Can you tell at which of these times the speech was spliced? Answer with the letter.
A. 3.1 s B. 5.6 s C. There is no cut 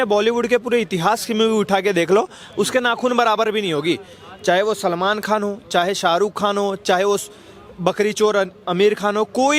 C